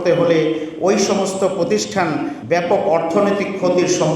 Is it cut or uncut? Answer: cut